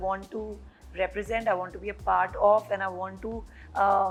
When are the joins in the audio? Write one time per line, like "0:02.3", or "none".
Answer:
none

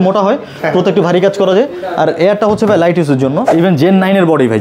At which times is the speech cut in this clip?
0:03.4

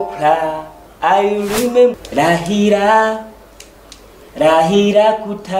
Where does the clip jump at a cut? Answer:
0:01.9

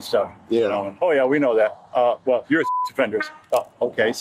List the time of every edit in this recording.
none

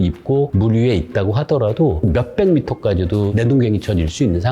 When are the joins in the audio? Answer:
0:02.0
0:03.3

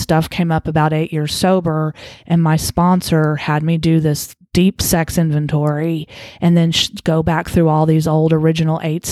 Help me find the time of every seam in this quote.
none

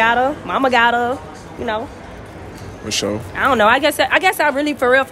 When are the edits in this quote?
none

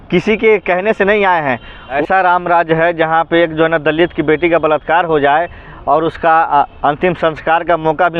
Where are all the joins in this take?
0:01.8

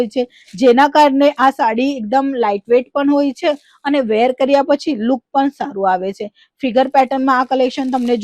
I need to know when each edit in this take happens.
none

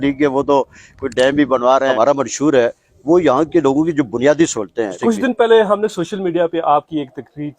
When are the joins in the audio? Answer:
0:01.9
0:05.0

